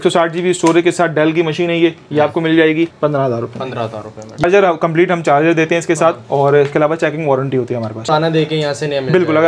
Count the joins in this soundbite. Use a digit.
3